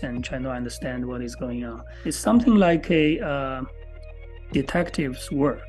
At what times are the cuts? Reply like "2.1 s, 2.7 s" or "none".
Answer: 1.9 s